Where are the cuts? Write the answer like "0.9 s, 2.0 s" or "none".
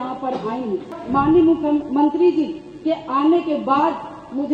1.0 s